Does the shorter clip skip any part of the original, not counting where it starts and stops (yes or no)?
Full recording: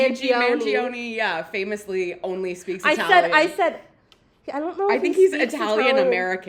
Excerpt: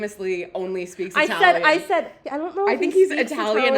yes